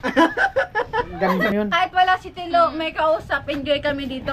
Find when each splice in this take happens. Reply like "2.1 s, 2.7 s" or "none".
1.5 s